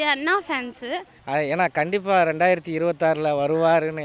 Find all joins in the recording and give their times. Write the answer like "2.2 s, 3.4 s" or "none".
1.1 s